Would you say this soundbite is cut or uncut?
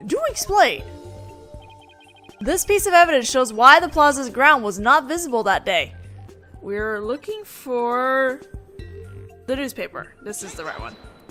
uncut